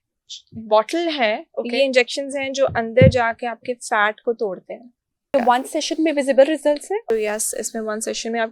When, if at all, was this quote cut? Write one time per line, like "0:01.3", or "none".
0:05.3
0:07.0